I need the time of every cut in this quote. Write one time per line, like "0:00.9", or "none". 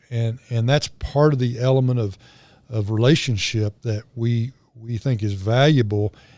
none